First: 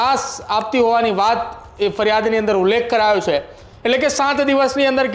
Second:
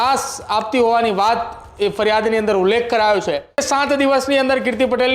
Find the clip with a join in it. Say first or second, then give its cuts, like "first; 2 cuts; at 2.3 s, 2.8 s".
second; 1 cut; at 3.6 s